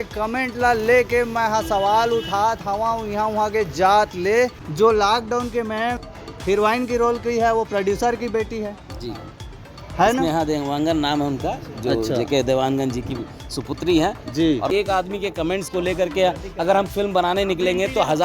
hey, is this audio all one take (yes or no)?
no